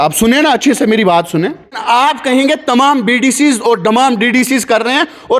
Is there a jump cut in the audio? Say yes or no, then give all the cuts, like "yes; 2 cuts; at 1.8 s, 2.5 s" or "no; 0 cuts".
yes; 1 cut; at 1.8 s